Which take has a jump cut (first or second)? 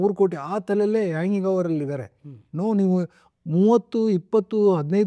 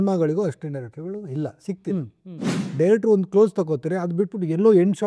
second